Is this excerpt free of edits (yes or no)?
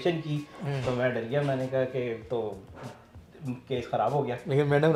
yes